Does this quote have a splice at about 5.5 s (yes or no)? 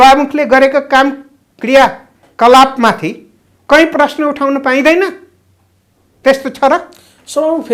no